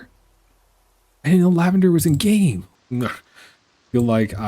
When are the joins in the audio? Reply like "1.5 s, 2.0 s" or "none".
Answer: 2.6 s

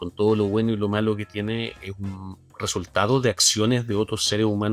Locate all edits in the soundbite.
none

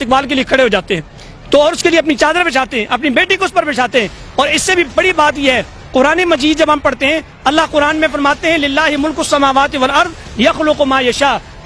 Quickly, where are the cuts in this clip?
none

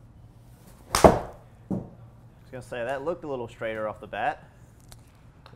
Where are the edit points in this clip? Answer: none

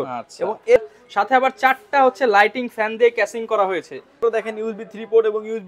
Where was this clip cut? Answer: 0.8 s, 4.2 s

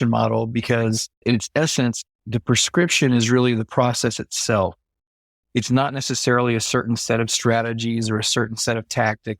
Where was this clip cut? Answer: 1.2 s

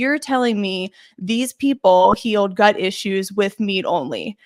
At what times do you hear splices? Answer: none

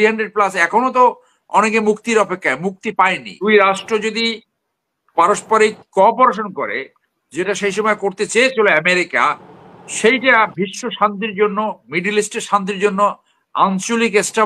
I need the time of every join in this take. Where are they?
3.5 s

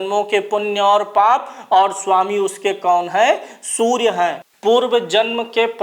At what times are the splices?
4.5 s

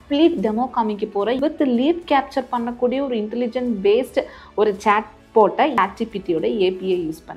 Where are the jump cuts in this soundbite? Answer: 1.4 s, 5.8 s

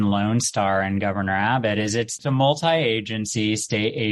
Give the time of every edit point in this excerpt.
2.2 s

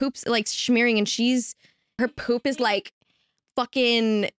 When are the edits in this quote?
2.0 s

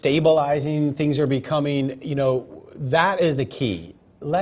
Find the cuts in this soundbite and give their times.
1.0 s

